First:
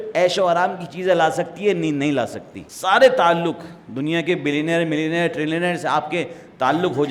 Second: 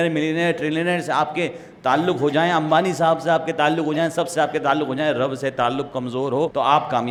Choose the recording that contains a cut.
first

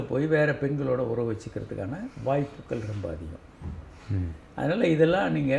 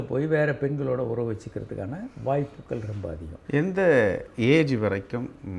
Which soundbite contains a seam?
second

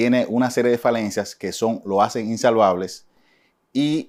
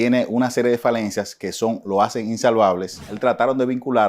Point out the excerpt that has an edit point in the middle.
second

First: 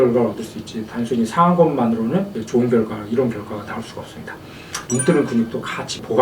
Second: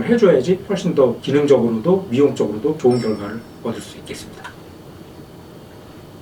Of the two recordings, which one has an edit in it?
first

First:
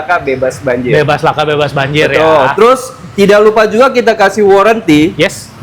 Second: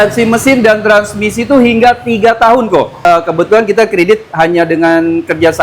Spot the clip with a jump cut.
second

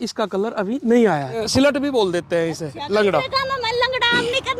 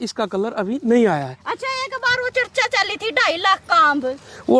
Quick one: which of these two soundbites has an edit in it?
first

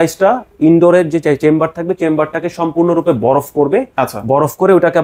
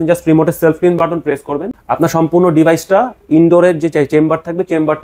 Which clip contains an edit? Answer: second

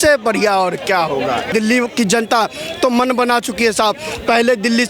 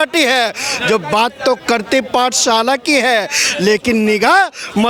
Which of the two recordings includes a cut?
first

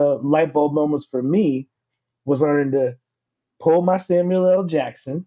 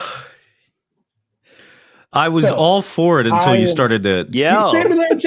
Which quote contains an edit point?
second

